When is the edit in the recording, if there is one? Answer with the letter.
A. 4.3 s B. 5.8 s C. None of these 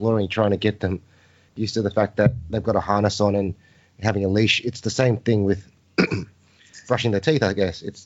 C